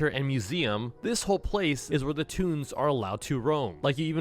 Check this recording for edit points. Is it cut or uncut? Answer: uncut